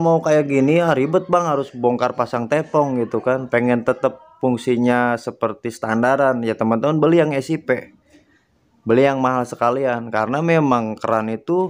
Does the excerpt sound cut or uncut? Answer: uncut